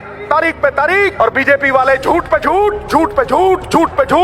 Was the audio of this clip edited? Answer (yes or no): yes